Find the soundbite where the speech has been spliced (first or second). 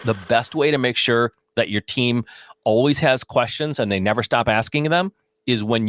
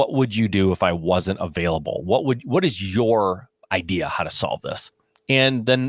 second